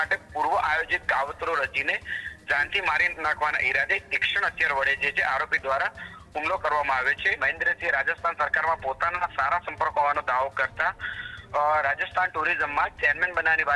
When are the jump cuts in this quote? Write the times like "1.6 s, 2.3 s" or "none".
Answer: 7.4 s